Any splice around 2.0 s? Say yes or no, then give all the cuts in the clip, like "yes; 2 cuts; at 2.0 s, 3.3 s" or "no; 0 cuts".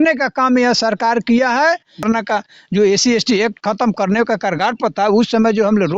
yes; 1 cut; at 2.0 s